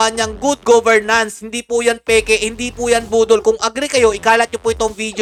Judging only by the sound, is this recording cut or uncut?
uncut